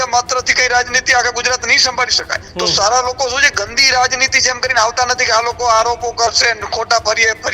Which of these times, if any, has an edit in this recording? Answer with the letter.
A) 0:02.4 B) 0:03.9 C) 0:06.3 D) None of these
A